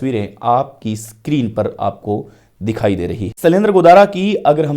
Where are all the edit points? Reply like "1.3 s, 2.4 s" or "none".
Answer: 3.3 s